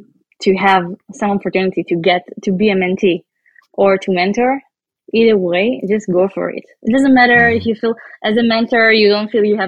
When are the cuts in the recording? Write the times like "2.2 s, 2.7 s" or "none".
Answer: none

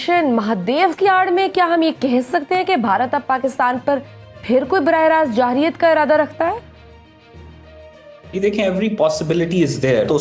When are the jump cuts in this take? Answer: none

